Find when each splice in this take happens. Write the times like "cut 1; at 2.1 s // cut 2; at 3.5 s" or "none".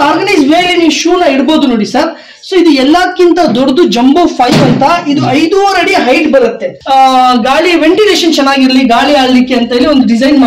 cut 1; at 6.7 s